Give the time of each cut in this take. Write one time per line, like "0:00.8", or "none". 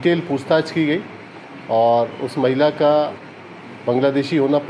none